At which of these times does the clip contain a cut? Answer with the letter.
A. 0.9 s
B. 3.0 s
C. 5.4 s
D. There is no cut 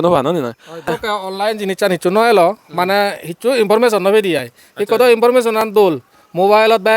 A